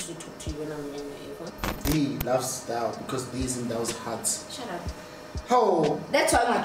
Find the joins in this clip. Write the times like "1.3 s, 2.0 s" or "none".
1.5 s